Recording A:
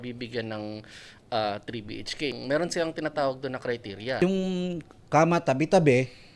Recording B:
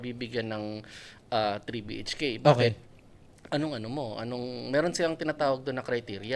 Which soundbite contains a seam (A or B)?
A